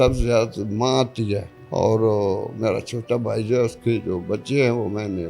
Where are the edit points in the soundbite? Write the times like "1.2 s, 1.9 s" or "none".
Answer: 1.6 s